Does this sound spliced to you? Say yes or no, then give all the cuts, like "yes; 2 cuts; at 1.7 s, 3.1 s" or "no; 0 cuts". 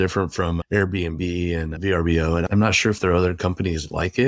yes; 1 cut; at 2.4 s